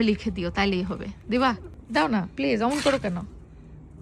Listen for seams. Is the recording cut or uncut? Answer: cut